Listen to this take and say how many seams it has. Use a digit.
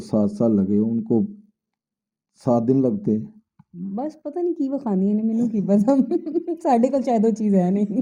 0